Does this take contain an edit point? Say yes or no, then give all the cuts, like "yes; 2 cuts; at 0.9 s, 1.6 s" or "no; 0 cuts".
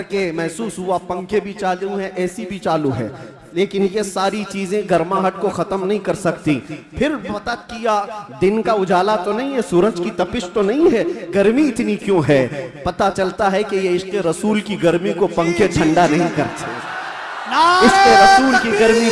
no; 0 cuts